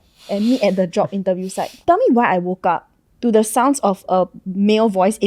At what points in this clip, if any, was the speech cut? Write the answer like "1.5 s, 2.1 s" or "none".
1.6 s